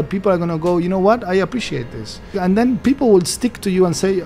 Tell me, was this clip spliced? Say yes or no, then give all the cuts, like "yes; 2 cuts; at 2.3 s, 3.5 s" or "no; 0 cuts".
yes; 1 cut; at 2.4 s